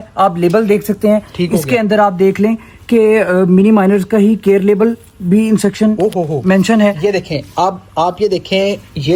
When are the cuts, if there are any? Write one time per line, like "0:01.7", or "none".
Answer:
none